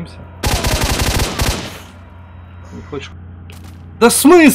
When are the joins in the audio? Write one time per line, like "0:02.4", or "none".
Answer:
0:03.1